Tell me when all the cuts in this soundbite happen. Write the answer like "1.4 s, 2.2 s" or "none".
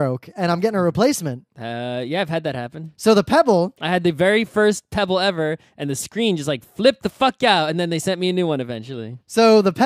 none